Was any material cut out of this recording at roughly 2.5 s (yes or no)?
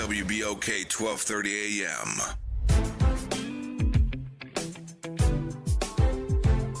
yes